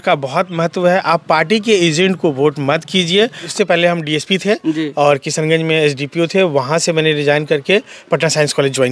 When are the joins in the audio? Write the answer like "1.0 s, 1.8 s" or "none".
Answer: 3.4 s